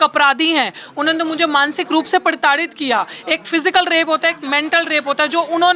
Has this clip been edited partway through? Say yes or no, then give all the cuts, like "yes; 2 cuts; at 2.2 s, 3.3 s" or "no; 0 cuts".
no; 0 cuts